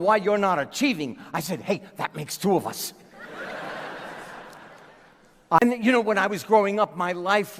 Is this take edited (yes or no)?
yes